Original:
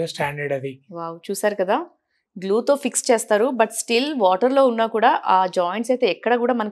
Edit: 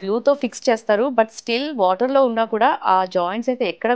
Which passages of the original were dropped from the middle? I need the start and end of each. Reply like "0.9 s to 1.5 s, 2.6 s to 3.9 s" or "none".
none